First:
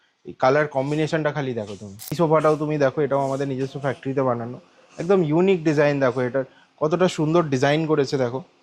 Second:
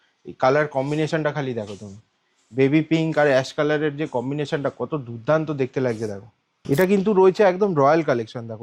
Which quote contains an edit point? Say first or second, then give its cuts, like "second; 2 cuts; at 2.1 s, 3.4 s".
first; 1 cut; at 2.1 s